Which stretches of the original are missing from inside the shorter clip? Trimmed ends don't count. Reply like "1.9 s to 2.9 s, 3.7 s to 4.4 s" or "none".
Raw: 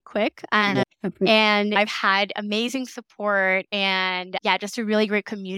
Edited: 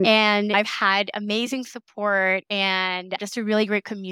4.4 s to 4.6 s

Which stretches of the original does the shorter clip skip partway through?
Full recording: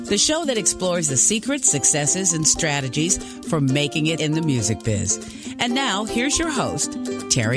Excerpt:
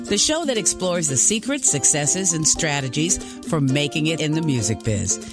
none

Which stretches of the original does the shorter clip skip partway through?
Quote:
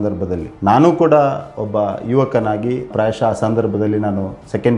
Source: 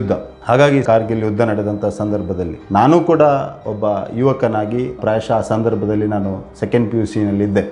none

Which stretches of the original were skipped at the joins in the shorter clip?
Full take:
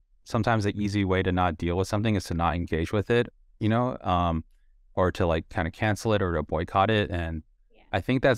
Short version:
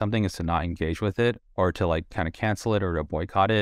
3.4 s to 4.8 s

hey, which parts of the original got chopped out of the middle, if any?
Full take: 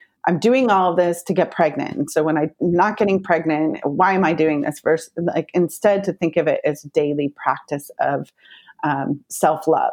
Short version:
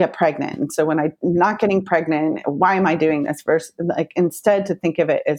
none

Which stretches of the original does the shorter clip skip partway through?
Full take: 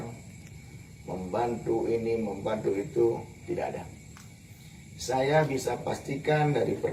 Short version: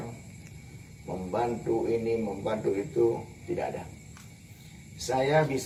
none

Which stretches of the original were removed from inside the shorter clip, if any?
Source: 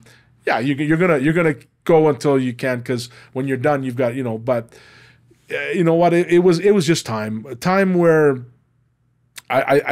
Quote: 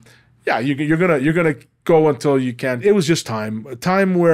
2.8 s to 6.6 s

